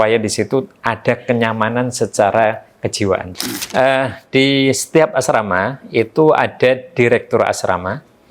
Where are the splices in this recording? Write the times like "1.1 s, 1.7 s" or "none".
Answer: 3.3 s